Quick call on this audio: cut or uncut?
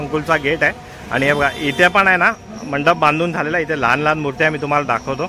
uncut